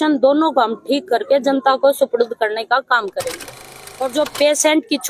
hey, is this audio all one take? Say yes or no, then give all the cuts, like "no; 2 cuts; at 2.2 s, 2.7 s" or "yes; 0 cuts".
no; 1 cut; at 3.8 s